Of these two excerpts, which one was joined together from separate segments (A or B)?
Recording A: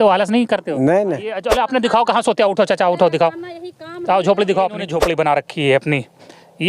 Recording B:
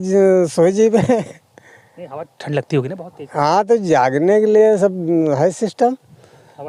A